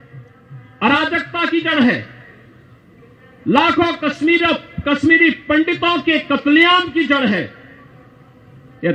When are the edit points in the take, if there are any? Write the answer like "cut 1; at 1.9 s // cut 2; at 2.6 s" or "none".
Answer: none